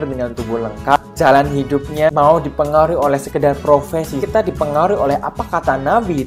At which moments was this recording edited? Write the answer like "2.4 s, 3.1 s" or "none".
1.0 s, 2.1 s, 4.2 s